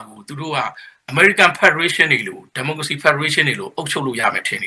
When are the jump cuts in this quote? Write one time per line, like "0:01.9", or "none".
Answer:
none